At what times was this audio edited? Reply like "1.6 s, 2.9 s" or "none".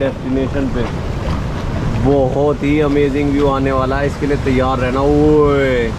none

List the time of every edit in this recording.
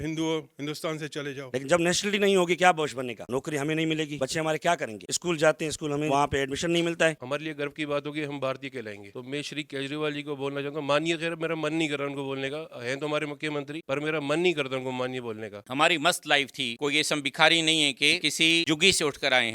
1.5 s, 6.1 s, 7.2 s, 9.1 s, 15.6 s, 18.2 s

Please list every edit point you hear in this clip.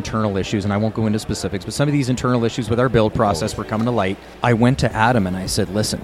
4.3 s

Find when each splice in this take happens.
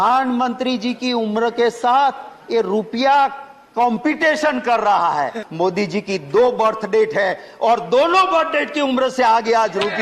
5.4 s

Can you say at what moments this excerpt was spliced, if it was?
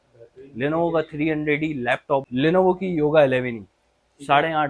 2.2 s

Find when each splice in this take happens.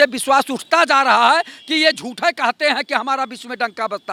none

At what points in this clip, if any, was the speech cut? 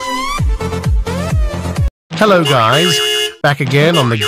none

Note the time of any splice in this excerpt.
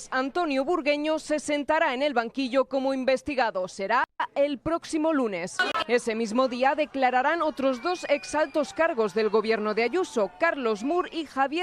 4.2 s, 5.7 s

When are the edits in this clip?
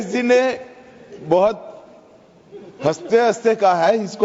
none

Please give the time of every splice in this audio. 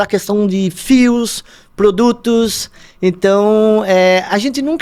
none

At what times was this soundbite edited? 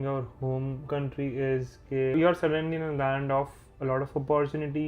0.8 s, 2.1 s

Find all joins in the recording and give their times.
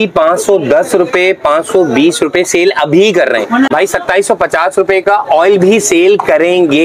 3.7 s

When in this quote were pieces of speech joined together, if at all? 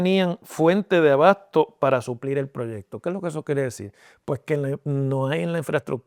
none

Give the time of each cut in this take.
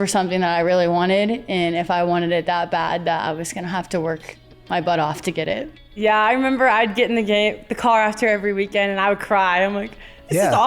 6.0 s

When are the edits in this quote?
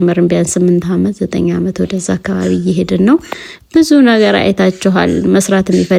none

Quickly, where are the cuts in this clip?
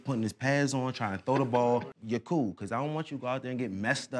1.9 s

